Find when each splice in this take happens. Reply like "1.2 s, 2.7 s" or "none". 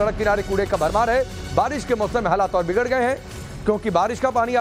none